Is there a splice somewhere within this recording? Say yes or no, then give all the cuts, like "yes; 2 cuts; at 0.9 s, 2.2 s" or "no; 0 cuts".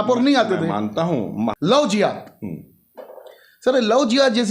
yes; 1 cut; at 1.6 s